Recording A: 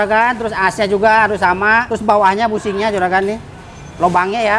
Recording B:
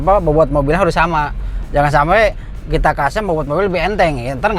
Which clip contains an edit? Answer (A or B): A